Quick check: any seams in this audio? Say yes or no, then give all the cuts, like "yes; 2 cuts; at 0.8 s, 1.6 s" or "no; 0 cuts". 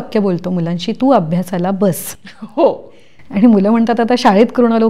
no; 0 cuts